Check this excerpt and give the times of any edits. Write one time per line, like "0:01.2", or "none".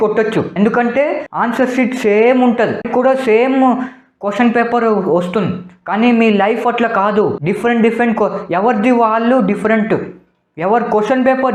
none